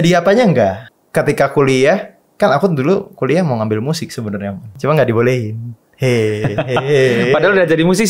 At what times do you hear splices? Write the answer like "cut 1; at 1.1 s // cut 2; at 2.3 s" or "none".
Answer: cut 1; at 0.9 s // cut 2; at 4.7 s